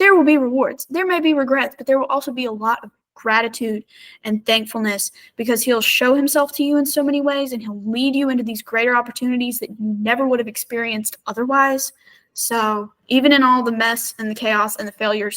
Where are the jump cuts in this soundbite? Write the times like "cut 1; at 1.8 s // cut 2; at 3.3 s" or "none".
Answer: cut 1; at 12.9 s